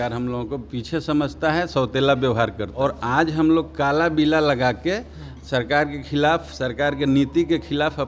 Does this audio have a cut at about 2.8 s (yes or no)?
yes